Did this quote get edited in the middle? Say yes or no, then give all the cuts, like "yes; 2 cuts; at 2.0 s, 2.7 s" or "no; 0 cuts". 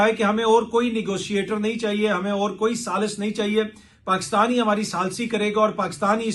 no; 0 cuts